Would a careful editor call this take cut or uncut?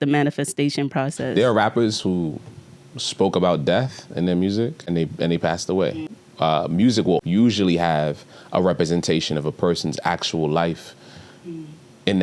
cut